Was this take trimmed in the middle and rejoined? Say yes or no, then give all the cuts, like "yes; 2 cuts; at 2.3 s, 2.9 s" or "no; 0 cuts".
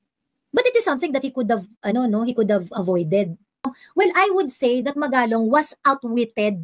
yes; 1 cut; at 3.8 s